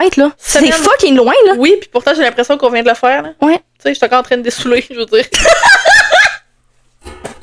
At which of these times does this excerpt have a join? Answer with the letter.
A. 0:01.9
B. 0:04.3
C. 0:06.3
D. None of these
D